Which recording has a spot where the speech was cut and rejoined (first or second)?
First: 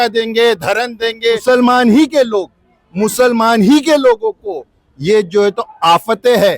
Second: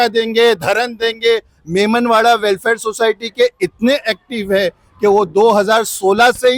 first